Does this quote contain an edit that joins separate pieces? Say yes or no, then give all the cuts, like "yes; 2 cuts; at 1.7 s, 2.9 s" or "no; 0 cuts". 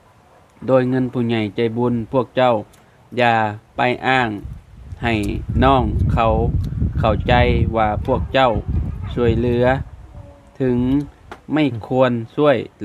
no; 0 cuts